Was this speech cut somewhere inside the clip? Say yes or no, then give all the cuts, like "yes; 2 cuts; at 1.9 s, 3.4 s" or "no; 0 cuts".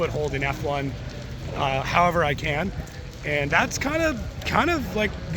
no; 0 cuts